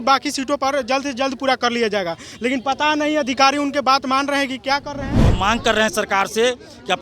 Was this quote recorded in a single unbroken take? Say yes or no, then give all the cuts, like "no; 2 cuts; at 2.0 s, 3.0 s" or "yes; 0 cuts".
no; 1 cut; at 5.2 s